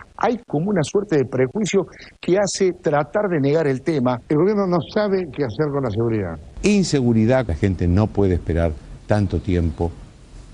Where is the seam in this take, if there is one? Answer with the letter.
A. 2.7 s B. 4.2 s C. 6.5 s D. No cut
C